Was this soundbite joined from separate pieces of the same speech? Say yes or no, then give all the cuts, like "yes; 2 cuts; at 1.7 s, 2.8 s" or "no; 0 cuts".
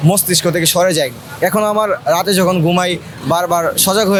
no; 0 cuts